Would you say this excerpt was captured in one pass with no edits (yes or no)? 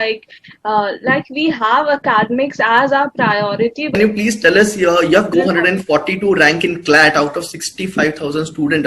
no